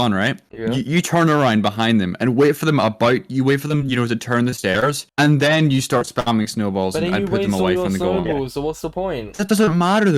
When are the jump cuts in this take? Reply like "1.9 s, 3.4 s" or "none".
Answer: none